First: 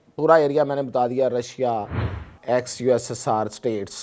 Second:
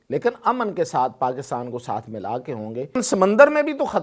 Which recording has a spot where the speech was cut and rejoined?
second; 1 cut; at 3.0 s

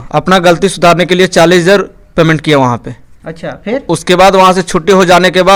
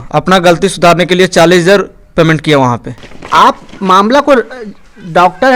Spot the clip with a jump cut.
second; 1 cut; at 3.1 s

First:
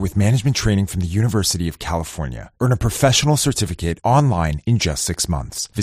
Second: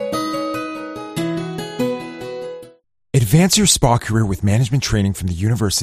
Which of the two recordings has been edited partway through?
second; 1 cut; at 2.6 s

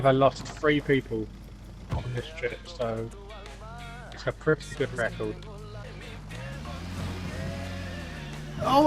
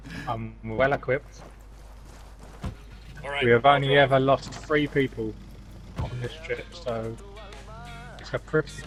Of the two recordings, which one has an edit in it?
first; 1 cut; at 5.8 s

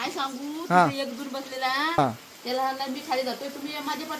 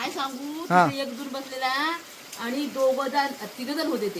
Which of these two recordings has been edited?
first; 1 cut; at 2.0 s

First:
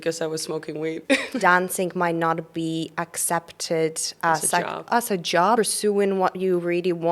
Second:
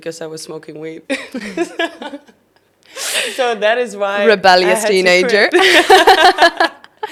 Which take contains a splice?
first; 2 cuts; at 1.3 s, 5.6 s

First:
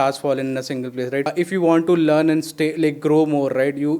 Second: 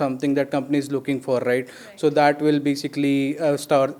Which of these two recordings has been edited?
first; 1 cut; at 1.3 s

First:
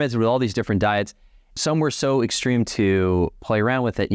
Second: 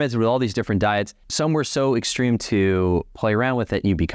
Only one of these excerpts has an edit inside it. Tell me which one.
second; 1 cut; at 1.2 s

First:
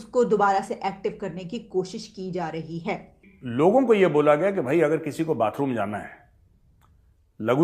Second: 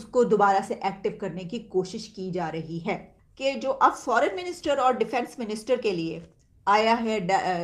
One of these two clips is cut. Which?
first; 1 cut; at 3.3 s

